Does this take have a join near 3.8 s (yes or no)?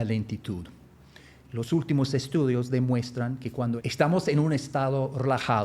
yes